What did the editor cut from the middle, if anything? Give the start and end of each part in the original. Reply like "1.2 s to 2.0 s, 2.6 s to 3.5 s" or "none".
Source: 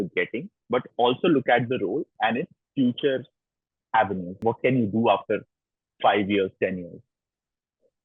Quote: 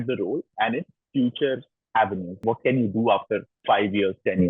3.4 s to 3.7 s, 5.5 s to 5.9 s